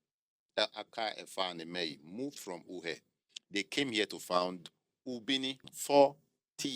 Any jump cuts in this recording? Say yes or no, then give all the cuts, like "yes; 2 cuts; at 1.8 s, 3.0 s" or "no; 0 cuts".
yes; 1 cut; at 5.7 s